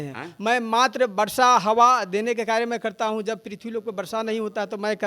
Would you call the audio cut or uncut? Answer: uncut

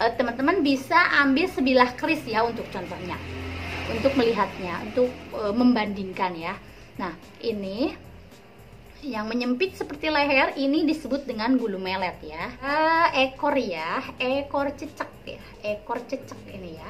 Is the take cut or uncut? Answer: cut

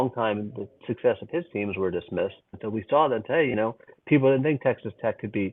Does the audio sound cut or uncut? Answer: cut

